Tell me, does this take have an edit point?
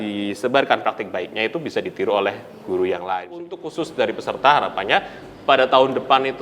yes; 1 cut; at 3.6 s

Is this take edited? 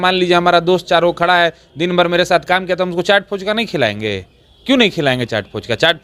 no; 0 cuts

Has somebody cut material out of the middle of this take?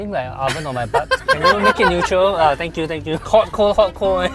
no; 0 cuts

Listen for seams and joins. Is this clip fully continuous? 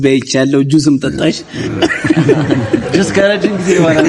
yes; 0 cuts

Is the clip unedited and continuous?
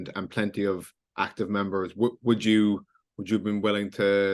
yes; 0 cuts

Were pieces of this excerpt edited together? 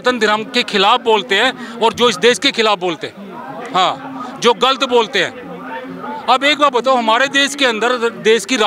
no; 0 cuts

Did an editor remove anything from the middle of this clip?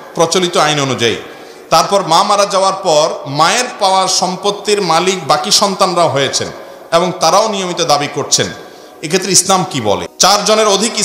yes; 1 cut; at 10.1 s

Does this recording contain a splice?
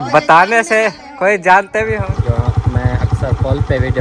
yes; 1 cut; at 2.0 s

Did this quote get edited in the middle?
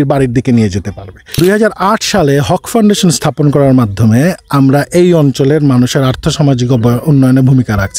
yes; 1 cut; at 1.4 s

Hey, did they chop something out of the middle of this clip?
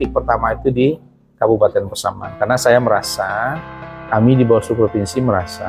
no; 0 cuts

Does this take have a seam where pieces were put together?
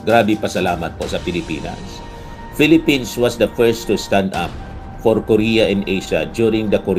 no; 0 cuts

